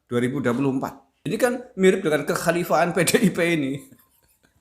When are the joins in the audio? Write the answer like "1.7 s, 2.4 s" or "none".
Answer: 1.1 s